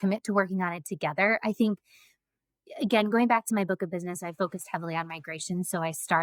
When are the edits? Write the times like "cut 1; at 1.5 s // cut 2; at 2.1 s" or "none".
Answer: none